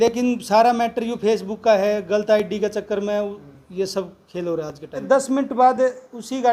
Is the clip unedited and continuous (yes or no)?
no